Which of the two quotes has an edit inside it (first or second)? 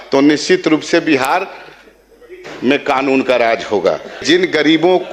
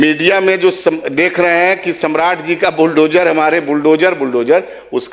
first